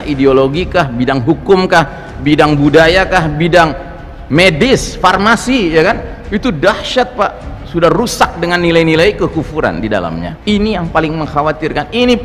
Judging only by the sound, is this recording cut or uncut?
cut